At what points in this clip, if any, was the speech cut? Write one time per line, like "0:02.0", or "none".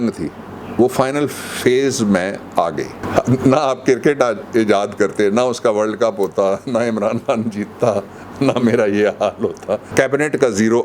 0:03.0
0:09.9